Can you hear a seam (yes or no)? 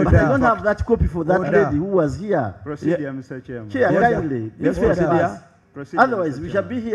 no